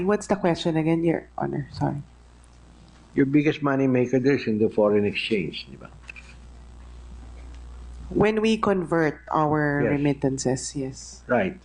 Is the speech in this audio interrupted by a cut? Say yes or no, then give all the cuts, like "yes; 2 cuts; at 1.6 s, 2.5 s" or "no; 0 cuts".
no; 0 cuts